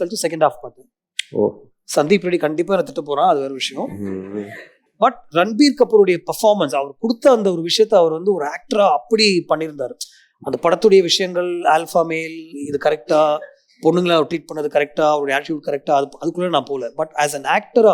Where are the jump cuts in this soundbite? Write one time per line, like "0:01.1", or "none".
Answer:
none

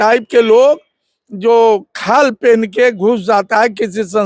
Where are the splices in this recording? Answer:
none

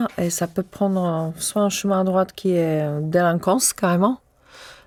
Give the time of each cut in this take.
none

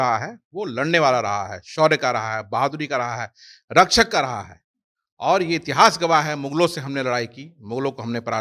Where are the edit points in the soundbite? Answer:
none

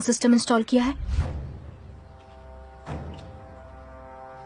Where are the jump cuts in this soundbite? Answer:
none

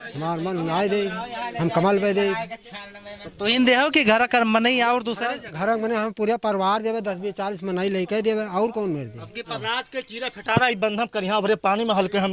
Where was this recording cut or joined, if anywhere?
0:09.5

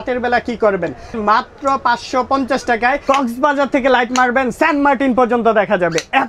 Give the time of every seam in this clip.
0:01.1
0:03.0

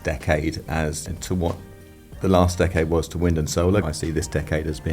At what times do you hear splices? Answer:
0:01.1
0:03.8

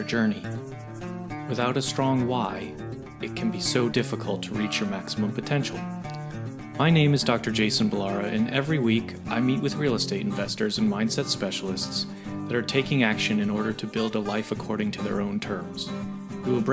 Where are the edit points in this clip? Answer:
none

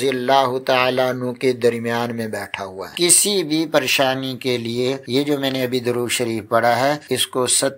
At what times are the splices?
0:02.9

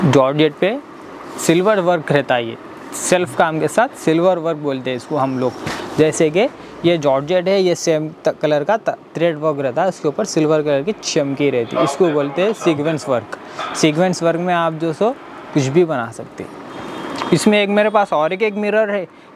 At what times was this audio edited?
none

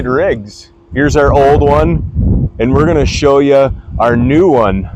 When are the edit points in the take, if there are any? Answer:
none

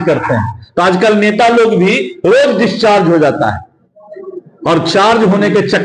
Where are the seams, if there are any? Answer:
none

